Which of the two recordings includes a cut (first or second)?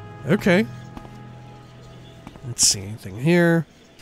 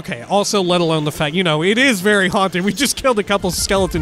first